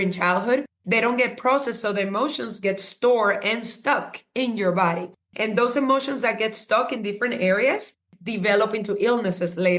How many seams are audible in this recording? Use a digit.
0